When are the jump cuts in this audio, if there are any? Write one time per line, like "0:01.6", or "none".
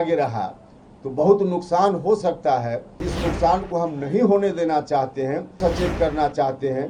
0:03.1
0:05.6